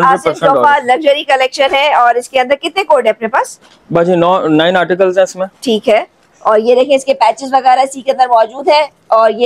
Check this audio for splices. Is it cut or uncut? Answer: uncut